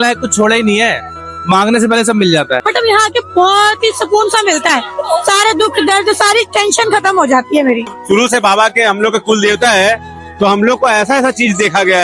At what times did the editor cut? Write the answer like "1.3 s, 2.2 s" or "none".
2.6 s, 8.0 s